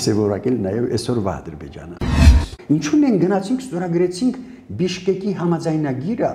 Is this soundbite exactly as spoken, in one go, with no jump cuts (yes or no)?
no